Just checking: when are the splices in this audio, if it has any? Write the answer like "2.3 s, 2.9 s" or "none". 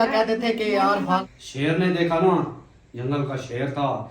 1.2 s